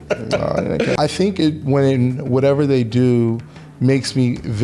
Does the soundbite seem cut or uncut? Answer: cut